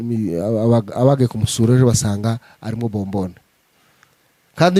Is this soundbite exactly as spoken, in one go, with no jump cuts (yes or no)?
yes